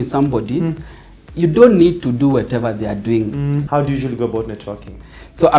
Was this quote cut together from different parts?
yes; 1 cut; at 3.6 s

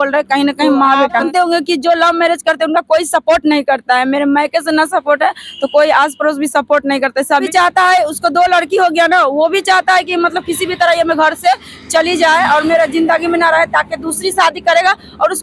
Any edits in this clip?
yes; 2 cuts; at 1.1 s, 7.5 s

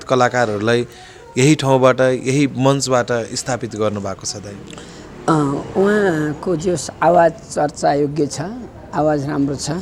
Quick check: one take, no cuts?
yes; 0 cuts

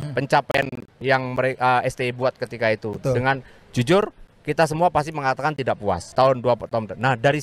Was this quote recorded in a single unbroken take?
no; 2 cuts; at 1.0 s, 6.1 s

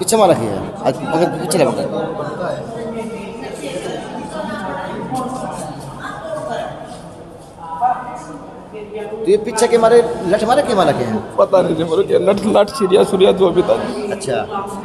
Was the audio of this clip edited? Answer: no; 0 cuts

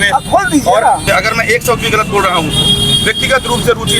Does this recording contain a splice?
yes; 1 cut; at 1.0 s

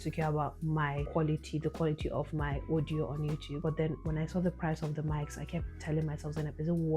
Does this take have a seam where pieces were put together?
yes; 2 cuts; at 1.0 s, 3.5 s

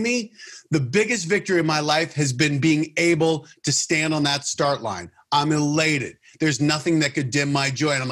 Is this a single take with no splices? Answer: yes; 0 cuts

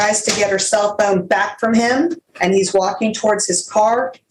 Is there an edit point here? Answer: yes; 1 cut; at 2.3 s

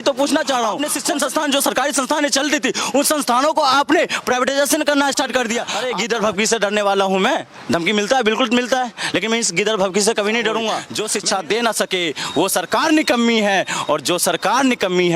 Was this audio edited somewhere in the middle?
yes; 3 cuts; at 0.9 s, 5.7 s, 10.9 s

